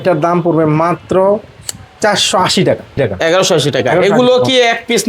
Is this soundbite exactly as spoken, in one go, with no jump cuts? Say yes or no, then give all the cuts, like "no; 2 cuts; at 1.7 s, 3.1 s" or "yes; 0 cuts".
no; 1 cut; at 2.9 s